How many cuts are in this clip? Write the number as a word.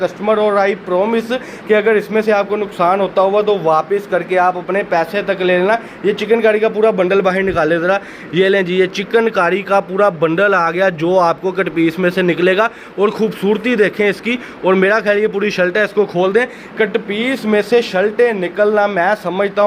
zero